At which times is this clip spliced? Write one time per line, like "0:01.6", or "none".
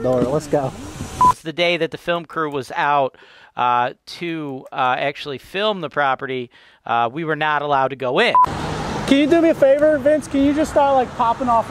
0:01.4
0:08.5